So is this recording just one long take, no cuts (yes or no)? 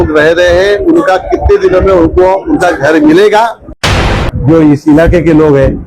no